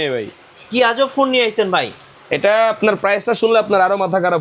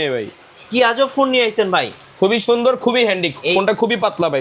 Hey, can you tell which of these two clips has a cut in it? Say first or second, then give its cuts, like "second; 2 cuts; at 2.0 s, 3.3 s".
second; 1 cut; at 2.0 s